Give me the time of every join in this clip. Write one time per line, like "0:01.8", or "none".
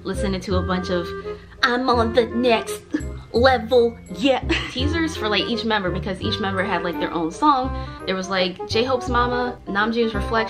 0:04.6